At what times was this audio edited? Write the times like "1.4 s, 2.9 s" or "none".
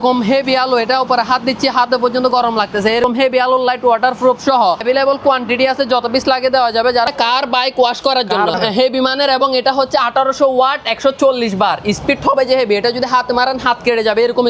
3.0 s, 4.8 s, 7.1 s, 8.5 s